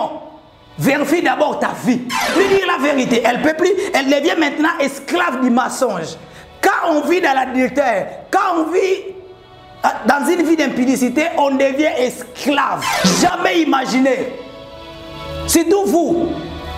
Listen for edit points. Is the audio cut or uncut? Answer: cut